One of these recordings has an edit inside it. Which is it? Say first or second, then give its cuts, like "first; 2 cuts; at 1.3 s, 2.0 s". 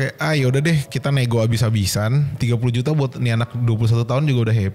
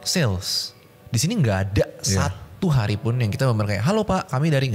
first; 2 cuts; at 0.8 s, 2.3 s